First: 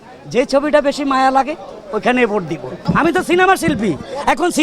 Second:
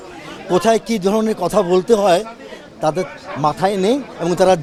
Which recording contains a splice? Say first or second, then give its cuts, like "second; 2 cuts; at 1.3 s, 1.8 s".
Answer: first; 1 cut; at 2.8 s